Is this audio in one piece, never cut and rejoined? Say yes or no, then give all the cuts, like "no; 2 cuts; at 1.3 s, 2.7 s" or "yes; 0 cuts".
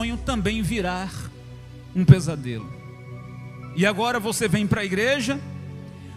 yes; 0 cuts